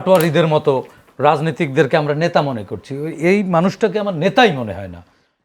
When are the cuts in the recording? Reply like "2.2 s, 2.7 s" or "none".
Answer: none